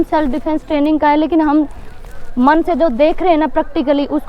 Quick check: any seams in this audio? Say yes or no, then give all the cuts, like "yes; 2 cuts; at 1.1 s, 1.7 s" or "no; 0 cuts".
no; 0 cuts